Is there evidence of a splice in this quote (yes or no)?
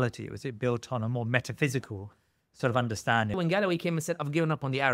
yes